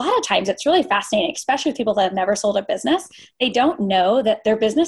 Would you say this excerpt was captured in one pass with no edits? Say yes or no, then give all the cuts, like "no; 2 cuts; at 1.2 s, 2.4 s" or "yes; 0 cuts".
yes; 0 cuts